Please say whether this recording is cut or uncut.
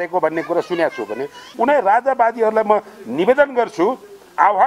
cut